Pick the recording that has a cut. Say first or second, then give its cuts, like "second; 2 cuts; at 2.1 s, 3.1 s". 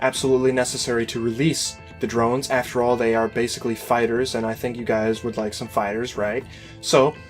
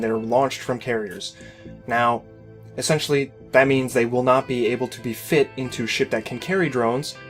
first; 1 cut; at 4.1 s